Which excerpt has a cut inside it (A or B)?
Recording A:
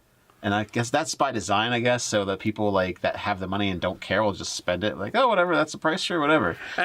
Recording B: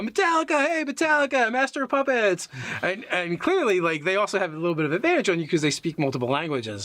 B